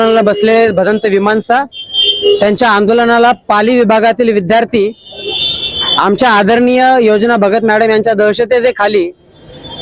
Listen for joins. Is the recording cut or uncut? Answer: uncut